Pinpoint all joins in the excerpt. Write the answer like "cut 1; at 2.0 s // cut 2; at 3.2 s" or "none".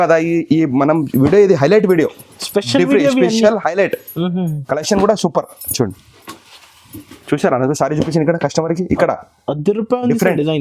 none